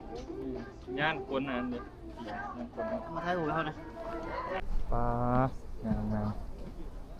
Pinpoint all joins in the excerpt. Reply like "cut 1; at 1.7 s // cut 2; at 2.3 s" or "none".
cut 1; at 4.6 s